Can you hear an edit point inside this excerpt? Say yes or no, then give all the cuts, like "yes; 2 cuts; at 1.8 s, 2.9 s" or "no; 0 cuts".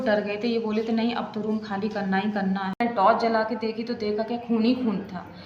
yes; 1 cut; at 2.8 s